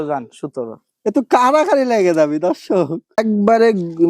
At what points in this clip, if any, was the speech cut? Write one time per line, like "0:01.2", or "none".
0:03.2